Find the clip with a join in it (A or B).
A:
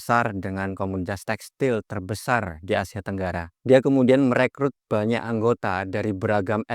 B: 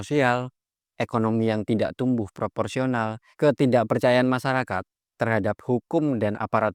A